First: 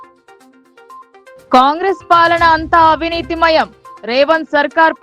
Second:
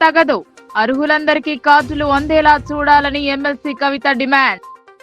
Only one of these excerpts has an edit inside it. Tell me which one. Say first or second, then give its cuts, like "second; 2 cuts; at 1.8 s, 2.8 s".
first; 1 cut; at 1.4 s